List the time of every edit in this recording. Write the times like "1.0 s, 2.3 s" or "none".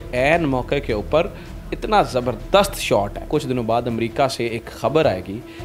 3.2 s